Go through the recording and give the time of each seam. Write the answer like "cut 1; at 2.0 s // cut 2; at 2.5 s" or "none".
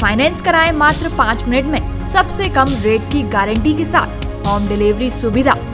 none